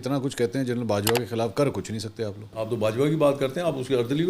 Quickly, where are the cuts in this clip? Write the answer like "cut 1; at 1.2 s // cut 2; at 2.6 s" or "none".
cut 1; at 2.5 s